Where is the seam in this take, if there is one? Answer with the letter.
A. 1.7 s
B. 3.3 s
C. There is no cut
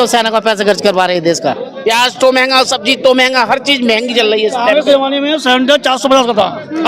A